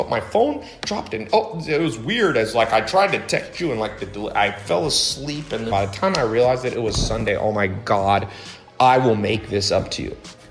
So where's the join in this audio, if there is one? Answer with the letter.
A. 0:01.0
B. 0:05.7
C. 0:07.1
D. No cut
B